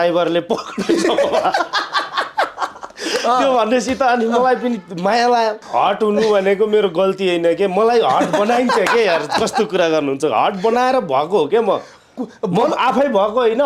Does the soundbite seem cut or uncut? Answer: cut